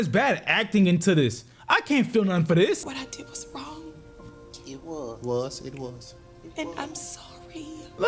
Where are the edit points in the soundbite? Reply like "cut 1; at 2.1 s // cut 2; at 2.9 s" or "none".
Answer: cut 1; at 2.8 s